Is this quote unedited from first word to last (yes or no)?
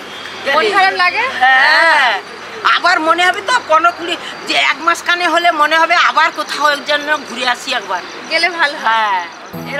yes